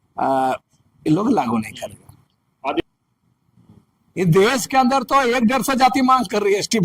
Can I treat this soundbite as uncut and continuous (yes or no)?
no